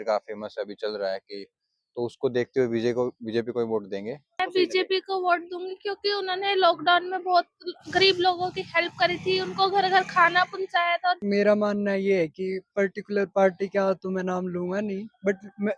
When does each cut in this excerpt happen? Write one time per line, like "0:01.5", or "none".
0:04.5
0:11.2